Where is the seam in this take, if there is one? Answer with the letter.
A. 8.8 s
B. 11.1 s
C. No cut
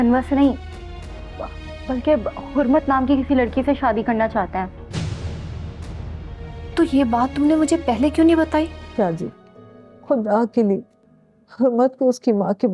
A